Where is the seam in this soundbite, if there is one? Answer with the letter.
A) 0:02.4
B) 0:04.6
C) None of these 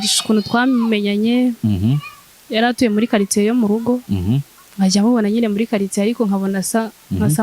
B